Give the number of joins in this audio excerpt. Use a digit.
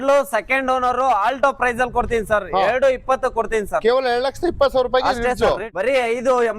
1